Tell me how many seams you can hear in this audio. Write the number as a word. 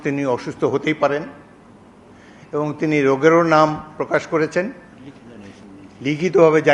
zero